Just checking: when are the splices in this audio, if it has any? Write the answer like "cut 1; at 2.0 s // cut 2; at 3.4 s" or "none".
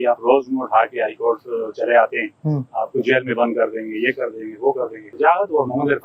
cut 1; at 5.1 s